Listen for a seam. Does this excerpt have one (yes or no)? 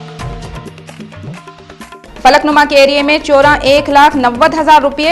yes